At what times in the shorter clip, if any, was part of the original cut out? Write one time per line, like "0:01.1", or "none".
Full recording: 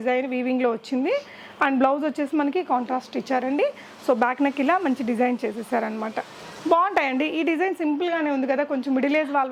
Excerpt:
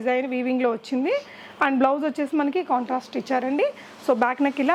none